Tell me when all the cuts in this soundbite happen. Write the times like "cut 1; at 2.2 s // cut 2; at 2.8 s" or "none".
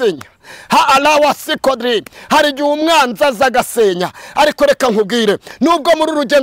none